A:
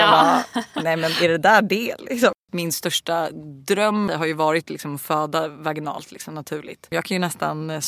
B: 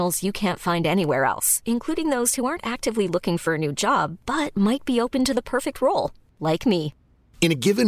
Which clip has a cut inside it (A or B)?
A